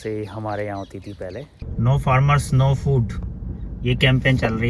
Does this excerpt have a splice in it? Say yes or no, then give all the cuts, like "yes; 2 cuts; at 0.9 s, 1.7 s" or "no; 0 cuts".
yes; 1 cut; at 1.6 s